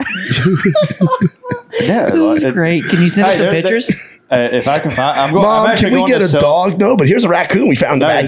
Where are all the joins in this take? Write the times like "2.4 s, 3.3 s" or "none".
none

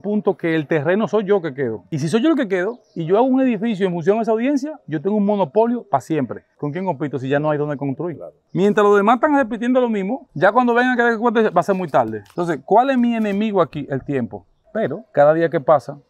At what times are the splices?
8.4 s, 14.5 s

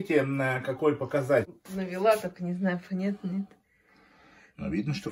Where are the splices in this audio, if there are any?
1.5 s

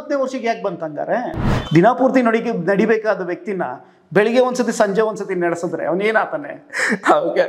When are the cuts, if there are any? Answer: 1.4 s

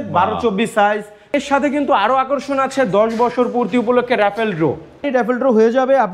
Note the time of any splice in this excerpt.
1.3 s, 5.0 s

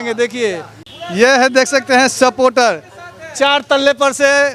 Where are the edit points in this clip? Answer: none

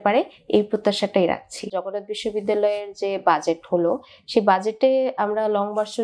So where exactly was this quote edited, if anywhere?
1.8 s

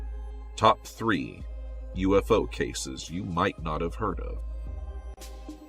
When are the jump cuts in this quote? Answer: 3.1 s

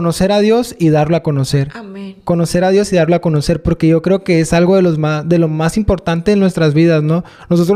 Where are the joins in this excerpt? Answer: none

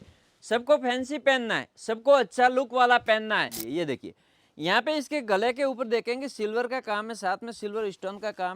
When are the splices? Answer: 3.6 s

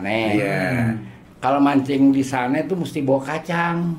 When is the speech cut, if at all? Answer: 1.1 s

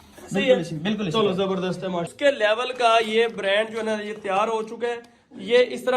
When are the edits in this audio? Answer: 2.1 s

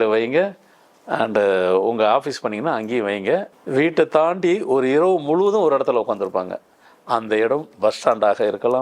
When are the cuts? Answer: 3.6 s

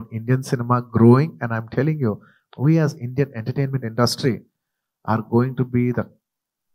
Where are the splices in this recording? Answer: 2.3 s

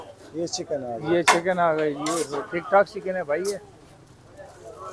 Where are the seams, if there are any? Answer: none

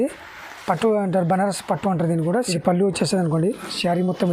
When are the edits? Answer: 2.5 s

